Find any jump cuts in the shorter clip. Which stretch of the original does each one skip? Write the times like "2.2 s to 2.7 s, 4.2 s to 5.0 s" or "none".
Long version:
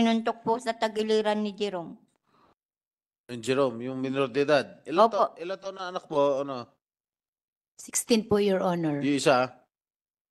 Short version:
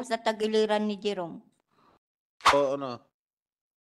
3.1 s to 6.2 s